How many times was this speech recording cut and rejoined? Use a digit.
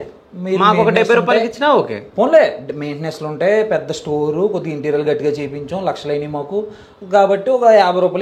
0